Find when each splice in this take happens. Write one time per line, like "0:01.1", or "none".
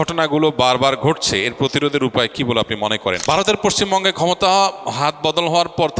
0:03.2